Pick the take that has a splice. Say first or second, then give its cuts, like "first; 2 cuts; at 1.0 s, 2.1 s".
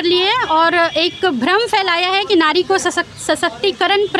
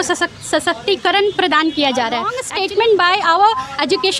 second; 1 cut; at 2.5 s